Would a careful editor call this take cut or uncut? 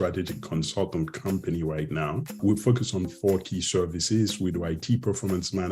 cut